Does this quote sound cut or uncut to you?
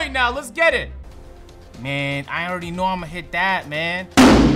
cut